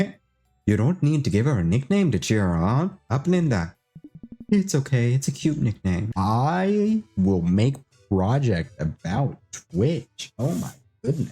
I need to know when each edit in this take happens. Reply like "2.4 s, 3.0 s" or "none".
6.1 s